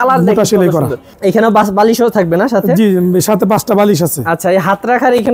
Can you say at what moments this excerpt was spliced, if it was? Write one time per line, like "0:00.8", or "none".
0:01.1